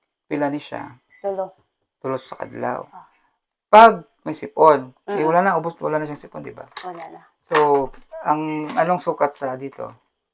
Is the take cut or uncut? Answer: uncut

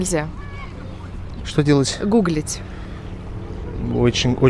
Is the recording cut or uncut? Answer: uncut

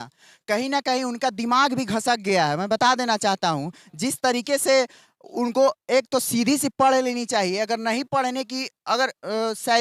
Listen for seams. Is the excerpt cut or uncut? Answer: uncut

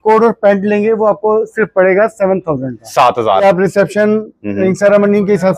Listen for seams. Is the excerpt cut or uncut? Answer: cut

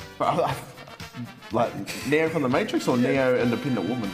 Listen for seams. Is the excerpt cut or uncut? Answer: uncut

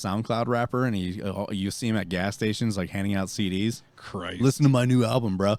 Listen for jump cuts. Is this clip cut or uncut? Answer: uncut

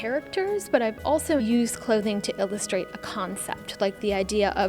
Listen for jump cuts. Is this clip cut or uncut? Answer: cut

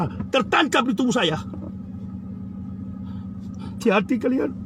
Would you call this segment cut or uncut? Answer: uncut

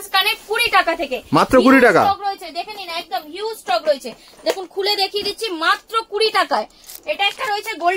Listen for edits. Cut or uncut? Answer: cut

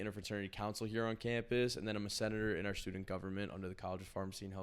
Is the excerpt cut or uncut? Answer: uncut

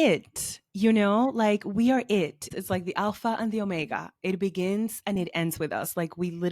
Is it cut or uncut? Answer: cut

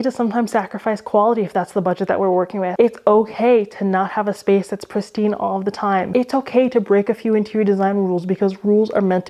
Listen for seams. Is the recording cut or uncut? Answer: cut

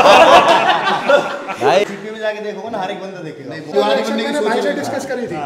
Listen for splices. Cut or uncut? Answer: cut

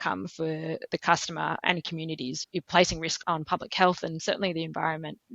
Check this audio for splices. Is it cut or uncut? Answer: cut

